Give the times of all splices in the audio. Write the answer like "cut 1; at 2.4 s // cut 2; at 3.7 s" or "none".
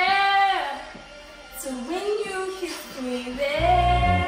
none

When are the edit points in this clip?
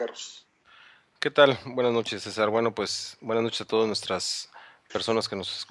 cut 1; at 3.5 s

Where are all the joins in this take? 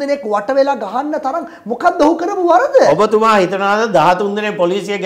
none

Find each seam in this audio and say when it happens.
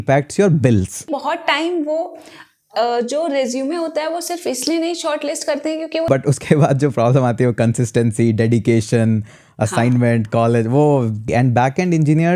cut 1; at 1.1 s // cut 2; at 6.1 s // cut 3; at 11.2 s

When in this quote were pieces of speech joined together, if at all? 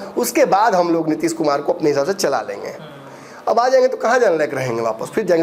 none

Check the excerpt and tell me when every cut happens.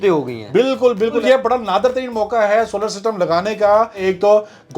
cut 1; at 1.2 s // cut 2; at 4.0 s

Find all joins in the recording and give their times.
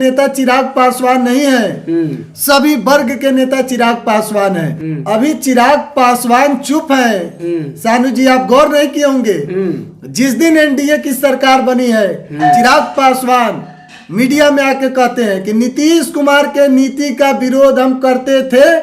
cut 1; at 4.7 s

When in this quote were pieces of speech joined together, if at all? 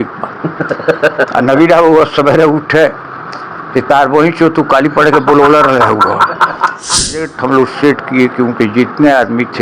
cut 1; at 7.0 s

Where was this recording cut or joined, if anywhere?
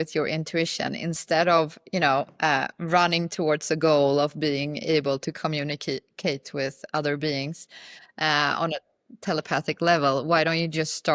none

